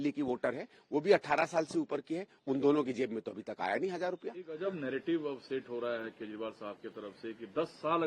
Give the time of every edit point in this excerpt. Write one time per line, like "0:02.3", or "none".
none